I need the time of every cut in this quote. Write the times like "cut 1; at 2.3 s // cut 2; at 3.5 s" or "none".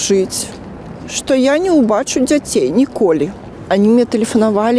cut 1; at 3.4 s